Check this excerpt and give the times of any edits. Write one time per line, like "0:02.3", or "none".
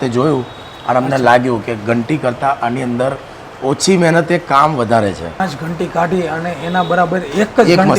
0:05.4

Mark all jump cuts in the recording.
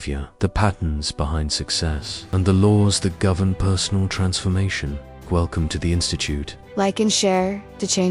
0:06.6

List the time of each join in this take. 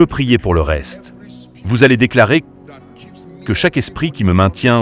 none

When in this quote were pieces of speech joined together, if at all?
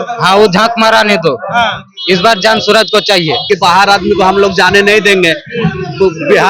0:03.5

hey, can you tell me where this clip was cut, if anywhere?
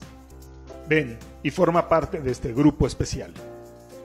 0:01.2

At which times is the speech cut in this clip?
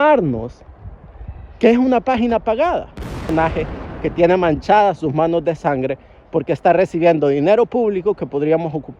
0:03.3

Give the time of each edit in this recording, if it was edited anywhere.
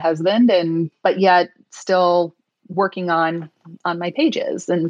0:00.9

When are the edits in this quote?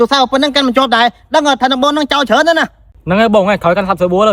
none

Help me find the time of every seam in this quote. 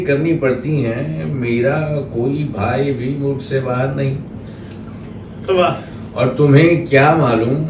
none

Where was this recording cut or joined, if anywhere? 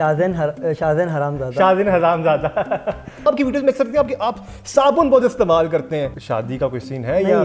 0:03.2
0:06.2

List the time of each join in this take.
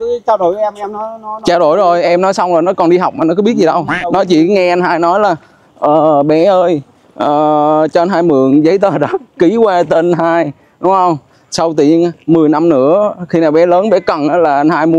none

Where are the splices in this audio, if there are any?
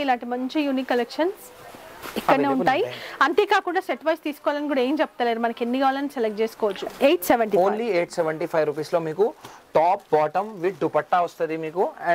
none

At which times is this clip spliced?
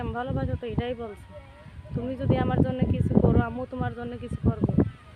none

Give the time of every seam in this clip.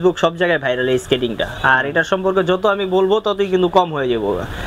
none

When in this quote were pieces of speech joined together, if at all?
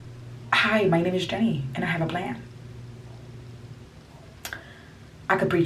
0:03.8

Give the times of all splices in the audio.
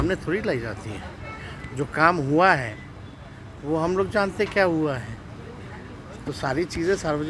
none

